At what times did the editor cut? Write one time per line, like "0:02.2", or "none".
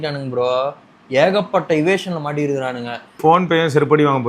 0:03.2